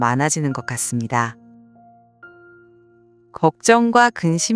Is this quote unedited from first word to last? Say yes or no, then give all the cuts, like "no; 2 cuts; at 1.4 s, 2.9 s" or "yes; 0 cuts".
yes; 0 cuts